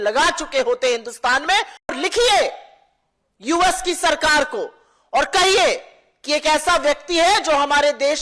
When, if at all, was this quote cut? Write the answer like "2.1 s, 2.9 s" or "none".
1.9 s